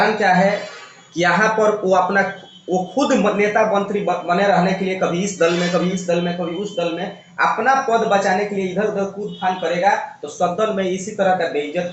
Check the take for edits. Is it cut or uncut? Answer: uncut